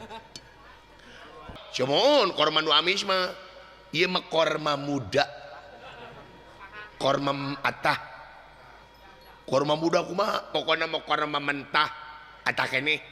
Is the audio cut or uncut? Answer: cut